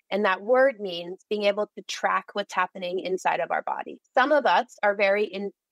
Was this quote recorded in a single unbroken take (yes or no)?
yes